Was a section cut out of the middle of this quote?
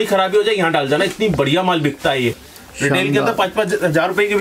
yes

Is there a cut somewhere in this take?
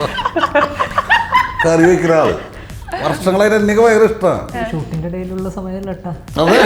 no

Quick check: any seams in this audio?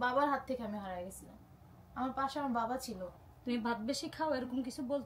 yes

